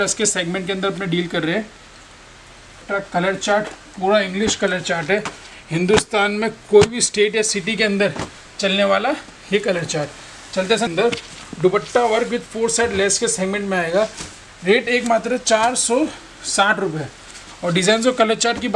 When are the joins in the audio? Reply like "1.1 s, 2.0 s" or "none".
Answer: 2.8 s, 10.9 s